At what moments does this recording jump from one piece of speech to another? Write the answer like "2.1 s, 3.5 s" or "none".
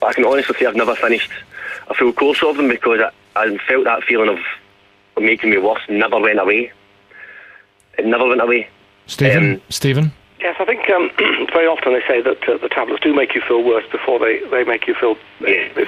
none